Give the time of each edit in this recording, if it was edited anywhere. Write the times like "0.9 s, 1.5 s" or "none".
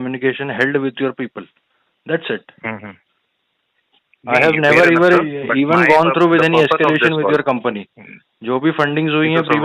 none